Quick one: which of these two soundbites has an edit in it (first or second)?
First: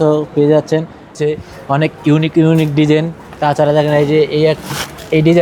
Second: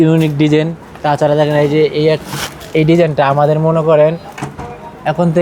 first